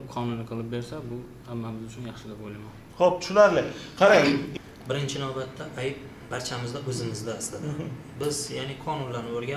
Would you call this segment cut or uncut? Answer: cut